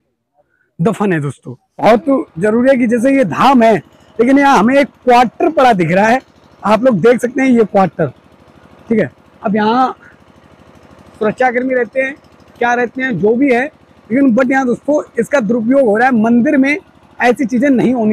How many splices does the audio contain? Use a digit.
1